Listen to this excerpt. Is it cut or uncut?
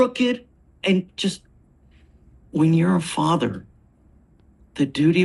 uncut